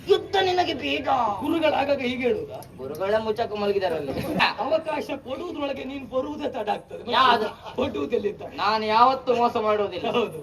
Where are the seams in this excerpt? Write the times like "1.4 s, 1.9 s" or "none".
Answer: 4.4 s